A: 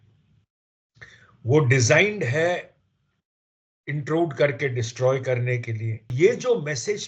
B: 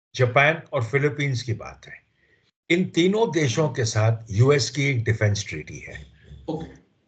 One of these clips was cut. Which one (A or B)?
A